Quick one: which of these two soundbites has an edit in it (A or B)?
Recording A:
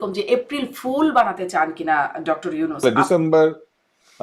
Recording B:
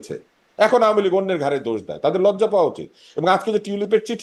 A